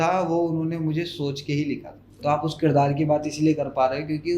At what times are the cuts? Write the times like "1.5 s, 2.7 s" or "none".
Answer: 2.0 s